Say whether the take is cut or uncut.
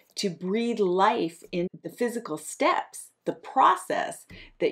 cut